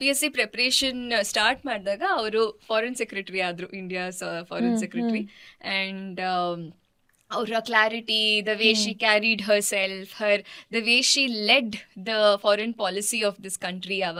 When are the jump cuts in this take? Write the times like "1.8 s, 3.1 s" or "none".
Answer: none